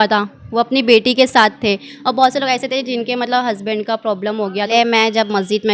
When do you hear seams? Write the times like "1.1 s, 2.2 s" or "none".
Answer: 4.7 s